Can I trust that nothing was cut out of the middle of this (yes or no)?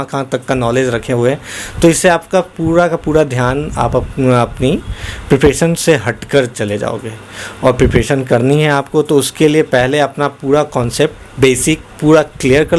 yes